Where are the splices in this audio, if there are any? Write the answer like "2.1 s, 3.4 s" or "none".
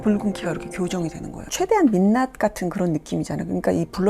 1.5 s